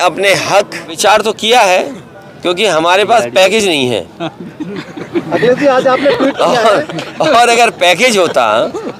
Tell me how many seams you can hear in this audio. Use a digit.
1